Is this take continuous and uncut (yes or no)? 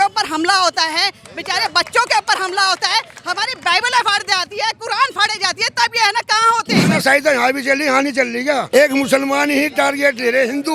no